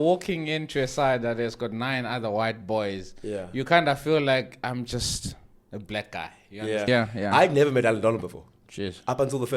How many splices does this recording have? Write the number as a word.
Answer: one